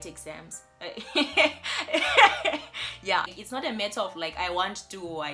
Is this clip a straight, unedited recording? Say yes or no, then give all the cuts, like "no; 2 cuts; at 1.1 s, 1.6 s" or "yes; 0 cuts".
no; 1 cut; at 3.4 s